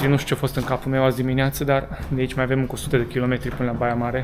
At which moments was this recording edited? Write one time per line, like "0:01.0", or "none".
none